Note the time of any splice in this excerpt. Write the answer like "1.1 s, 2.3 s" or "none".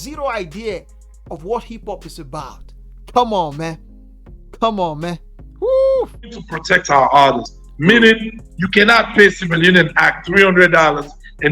6.5 s